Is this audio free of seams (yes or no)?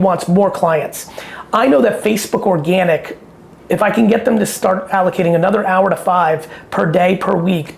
yes